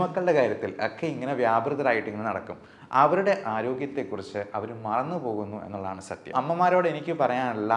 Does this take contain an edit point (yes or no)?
yes